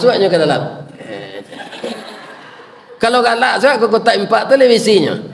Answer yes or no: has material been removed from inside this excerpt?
no